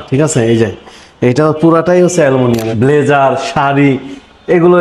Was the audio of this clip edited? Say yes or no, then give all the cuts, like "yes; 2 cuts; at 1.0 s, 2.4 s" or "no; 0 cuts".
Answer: yes; 1 cut; at 2.7 s